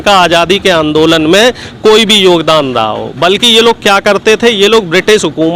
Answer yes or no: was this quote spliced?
no